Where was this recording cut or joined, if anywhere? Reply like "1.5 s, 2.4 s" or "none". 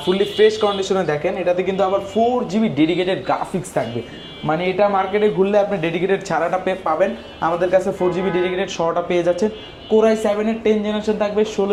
none